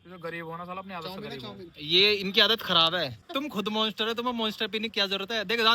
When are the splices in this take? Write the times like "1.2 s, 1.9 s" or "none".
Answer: 3.2 s